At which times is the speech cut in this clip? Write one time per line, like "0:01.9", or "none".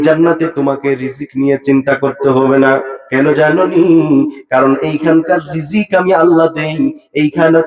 none